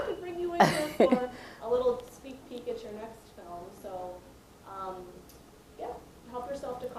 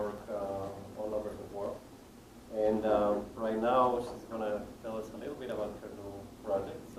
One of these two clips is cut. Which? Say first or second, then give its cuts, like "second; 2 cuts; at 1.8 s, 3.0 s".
first; 1 cut; at 3.4 s